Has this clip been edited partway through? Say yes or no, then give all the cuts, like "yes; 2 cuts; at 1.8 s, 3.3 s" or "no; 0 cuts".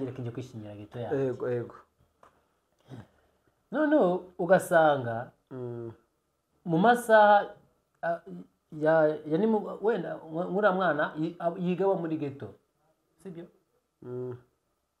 no; 0 cuts